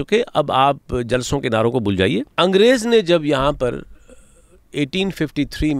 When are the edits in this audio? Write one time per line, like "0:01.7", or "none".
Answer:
0:02.3